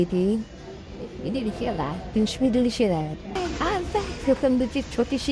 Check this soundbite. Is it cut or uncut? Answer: cut